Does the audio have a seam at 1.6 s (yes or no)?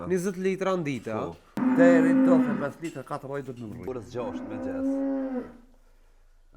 yes